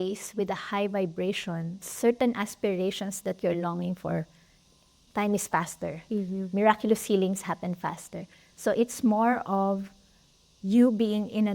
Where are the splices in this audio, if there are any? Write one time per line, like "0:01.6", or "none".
0:01.9
0:05.0